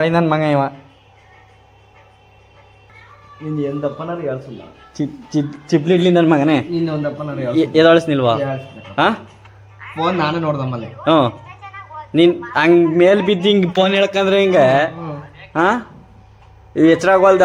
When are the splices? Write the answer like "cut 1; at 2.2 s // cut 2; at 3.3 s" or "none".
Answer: none